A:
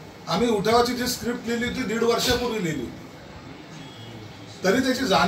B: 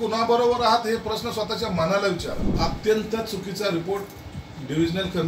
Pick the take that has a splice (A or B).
B